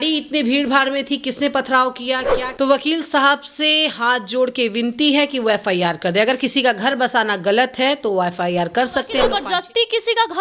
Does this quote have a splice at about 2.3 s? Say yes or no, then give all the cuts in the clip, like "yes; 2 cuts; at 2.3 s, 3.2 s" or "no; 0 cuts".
yes; 2 cuts; at 2.3 s, 9.3 s